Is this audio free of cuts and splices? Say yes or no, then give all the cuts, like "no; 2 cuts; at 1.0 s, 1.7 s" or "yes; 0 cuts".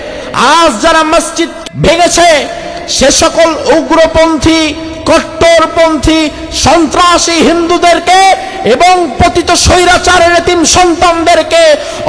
no; 1 cut; at 1.6 s